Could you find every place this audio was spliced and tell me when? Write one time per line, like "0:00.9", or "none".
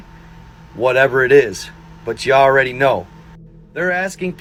none